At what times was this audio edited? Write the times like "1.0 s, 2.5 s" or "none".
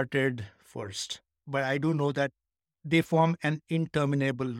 1.4 s